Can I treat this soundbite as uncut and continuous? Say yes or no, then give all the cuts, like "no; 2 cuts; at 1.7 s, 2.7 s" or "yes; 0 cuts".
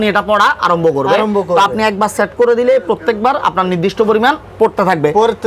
yes; 0 cuts